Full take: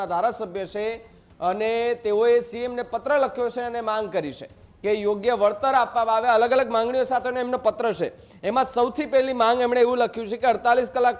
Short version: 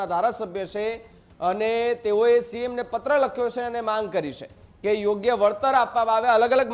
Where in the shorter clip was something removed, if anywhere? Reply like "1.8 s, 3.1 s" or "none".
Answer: none